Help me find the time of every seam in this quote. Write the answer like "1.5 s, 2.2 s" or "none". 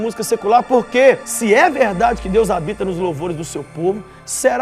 1.3 s